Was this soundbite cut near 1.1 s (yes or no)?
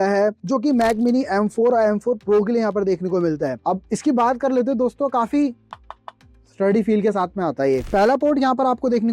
no